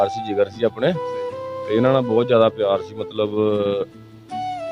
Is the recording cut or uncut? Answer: uncut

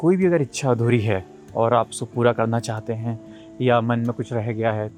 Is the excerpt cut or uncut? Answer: uncut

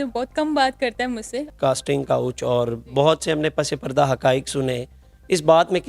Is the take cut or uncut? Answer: cut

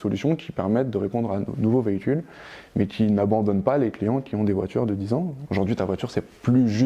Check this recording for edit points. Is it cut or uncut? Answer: cut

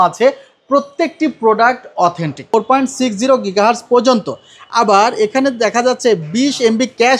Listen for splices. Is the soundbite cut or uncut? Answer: cut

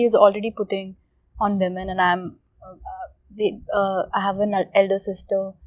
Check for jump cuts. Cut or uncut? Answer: uncut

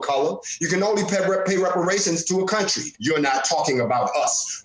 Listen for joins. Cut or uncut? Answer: cut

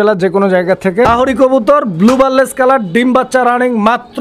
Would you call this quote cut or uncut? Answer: cut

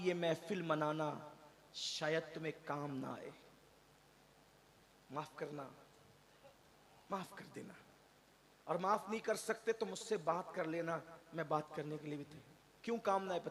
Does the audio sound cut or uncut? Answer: uncut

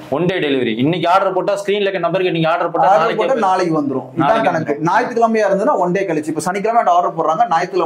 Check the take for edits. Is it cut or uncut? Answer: uncut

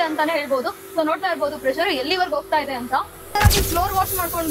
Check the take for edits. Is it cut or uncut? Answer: cut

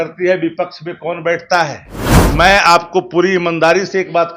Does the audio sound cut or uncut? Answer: cut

